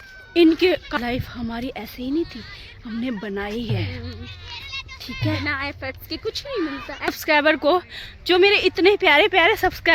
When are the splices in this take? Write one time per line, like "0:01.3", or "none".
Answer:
0:01.0
0:07.2